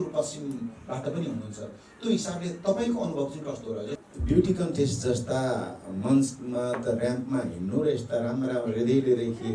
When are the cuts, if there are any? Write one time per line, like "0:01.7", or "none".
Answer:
0:03.9